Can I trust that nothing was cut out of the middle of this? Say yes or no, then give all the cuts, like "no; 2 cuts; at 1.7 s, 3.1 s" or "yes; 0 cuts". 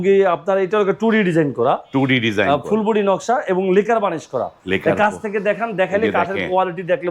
yes; 0 cuts